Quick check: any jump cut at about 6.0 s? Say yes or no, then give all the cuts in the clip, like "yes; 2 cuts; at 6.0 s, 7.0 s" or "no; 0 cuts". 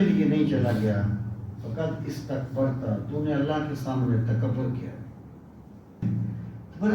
yes; 1 cut; at 6.0 s